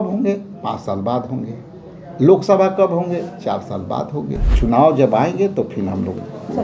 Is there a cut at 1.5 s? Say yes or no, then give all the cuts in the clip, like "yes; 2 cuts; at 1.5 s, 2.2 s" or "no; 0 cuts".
no; 1 cut; at 4.5 s